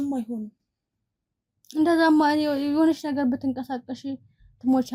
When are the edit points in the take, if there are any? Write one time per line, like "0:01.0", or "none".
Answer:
none